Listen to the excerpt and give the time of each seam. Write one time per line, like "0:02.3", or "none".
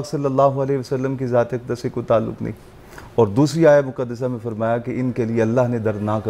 none